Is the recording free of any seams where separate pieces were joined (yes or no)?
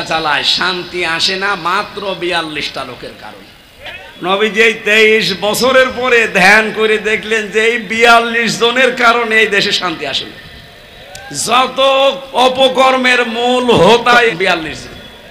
no